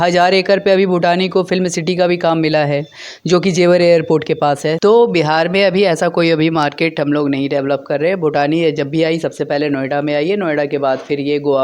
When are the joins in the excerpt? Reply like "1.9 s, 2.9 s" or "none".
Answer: 4.7 s

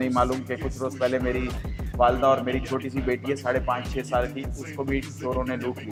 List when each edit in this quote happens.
none

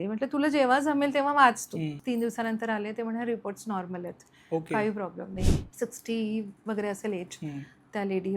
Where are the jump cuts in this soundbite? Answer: 2.0 s, 5.6 s

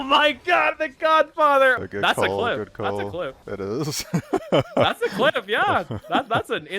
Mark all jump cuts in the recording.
1.8 s, 3.5 s

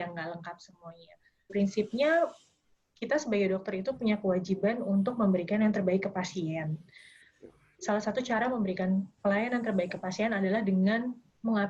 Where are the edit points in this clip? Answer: 1.5 s

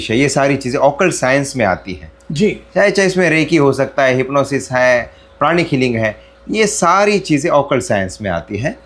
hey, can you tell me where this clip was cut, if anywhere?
none

